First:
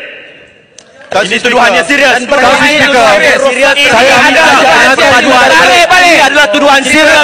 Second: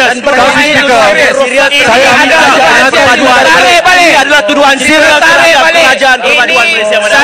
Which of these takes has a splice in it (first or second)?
first